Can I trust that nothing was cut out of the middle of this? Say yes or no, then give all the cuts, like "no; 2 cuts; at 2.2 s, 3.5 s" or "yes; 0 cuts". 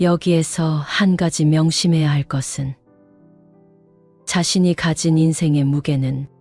yes; 0 cuts